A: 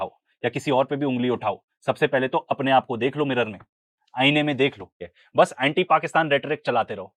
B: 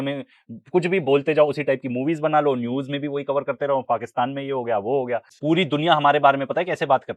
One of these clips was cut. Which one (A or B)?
A